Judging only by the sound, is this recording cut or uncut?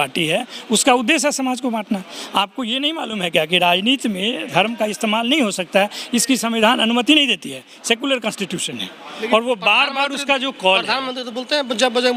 uncut